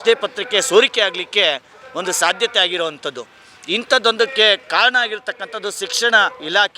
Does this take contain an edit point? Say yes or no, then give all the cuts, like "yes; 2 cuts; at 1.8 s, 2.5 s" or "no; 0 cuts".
no; 0 cuts